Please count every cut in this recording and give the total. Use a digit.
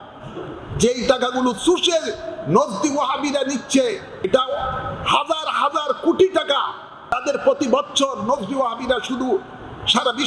2